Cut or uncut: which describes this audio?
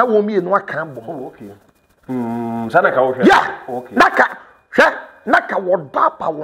uncut